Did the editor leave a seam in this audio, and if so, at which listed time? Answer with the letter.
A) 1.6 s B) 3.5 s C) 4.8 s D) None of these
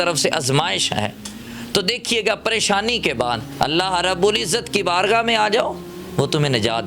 B